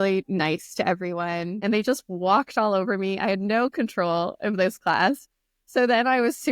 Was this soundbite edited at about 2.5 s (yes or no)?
no